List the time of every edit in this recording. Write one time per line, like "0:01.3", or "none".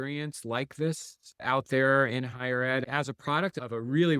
0:02.9